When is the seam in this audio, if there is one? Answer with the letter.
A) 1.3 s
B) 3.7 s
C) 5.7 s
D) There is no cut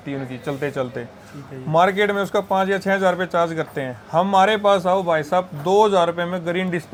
D